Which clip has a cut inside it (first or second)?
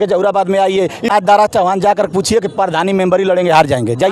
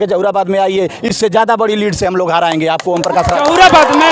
first